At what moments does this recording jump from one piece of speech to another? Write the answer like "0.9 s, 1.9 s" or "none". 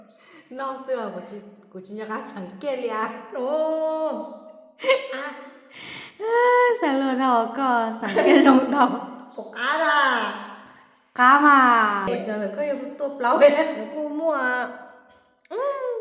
12.1 s